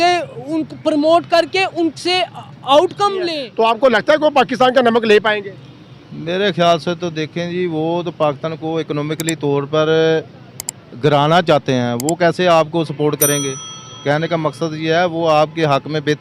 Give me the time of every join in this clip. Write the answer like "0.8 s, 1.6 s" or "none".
3.4 s